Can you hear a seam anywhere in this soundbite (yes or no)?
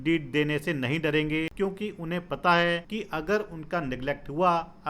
yes